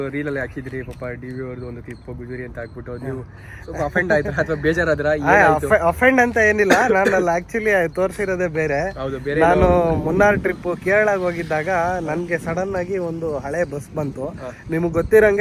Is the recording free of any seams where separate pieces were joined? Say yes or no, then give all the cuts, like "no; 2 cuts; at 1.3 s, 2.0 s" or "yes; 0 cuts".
yes; 0 cuts